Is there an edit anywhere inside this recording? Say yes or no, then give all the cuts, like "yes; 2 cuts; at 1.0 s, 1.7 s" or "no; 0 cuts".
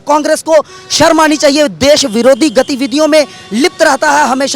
no; 0 cuts